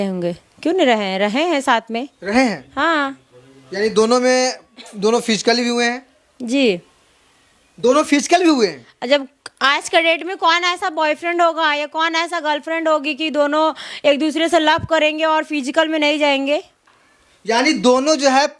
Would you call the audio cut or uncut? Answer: uncut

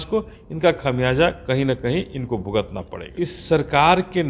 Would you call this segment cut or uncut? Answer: cut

